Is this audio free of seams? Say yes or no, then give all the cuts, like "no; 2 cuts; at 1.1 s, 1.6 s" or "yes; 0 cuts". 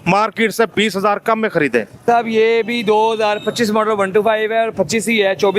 no; 1 cut; at 2.0 s